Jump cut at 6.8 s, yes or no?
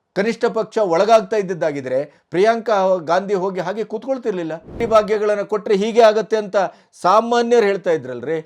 no